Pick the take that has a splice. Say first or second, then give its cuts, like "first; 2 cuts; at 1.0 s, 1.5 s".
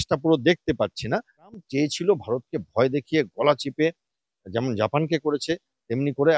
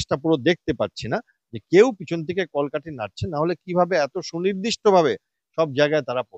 first; 1 cut; at 1.6 s